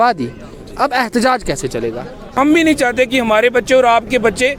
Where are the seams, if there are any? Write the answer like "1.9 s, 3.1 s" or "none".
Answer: 2.3 s